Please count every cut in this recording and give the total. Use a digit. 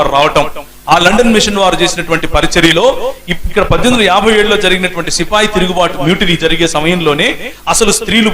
1